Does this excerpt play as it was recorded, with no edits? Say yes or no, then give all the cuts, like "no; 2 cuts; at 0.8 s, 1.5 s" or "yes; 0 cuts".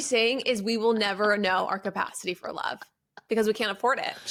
yes; 0 cuts